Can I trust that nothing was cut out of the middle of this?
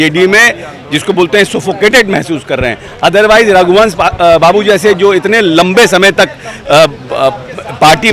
yes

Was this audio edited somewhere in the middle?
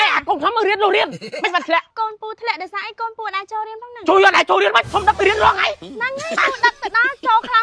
yes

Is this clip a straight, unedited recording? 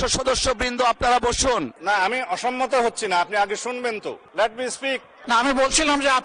no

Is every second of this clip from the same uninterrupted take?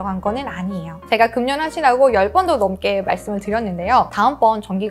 no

